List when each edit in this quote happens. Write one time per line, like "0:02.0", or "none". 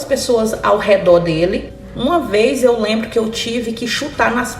0:01.7